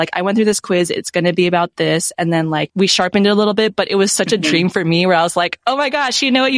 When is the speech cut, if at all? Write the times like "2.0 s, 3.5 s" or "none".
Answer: 2.7 s